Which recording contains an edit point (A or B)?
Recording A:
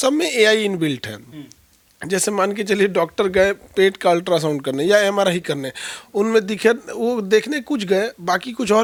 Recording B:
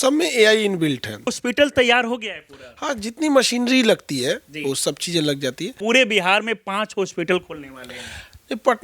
B